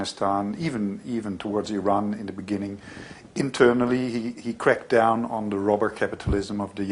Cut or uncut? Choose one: uncut